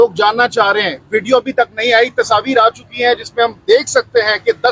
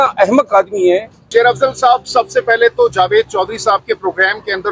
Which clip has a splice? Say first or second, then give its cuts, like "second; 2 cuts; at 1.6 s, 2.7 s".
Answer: second; 1 cut; at 1.2 s